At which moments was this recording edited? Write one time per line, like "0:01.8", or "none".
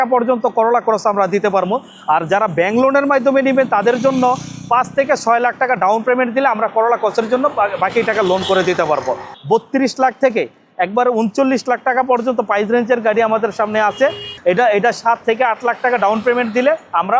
0:09.3
0:14.3